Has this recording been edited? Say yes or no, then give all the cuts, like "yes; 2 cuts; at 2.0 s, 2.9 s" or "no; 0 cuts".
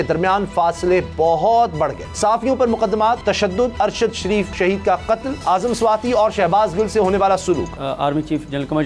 yes; 5 cuts; at 2.0 s, 3.5 s, 4.5 s, 5.3 s, 7.8 s